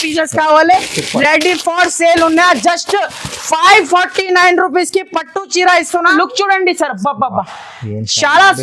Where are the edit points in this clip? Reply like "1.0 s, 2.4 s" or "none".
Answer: 6.1 s